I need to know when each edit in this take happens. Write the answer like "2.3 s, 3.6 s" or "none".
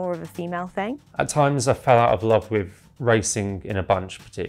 1.0 s, 2.8 s